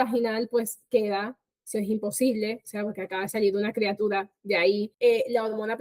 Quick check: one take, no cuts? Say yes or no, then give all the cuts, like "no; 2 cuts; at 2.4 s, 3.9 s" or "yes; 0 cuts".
no; 1 cut; at 4.9 s